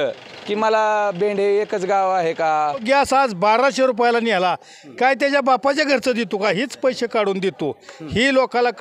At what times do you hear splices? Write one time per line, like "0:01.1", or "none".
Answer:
0:02.8